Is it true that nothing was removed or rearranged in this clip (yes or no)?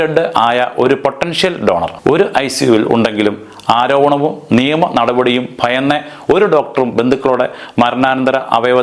yes